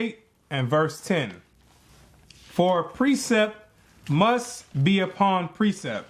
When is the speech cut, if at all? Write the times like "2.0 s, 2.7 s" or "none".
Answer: none